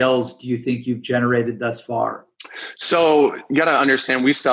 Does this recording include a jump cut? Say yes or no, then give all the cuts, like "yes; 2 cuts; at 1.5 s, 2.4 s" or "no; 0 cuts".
no; 0 cuts